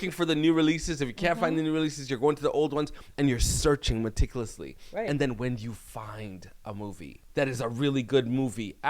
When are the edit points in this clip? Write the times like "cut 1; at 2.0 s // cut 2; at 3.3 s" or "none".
cut 1; at 7.2 s